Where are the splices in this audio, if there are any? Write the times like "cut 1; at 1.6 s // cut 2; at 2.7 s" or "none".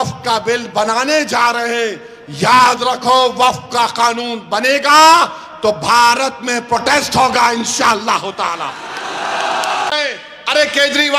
cut 1; at 9.9 s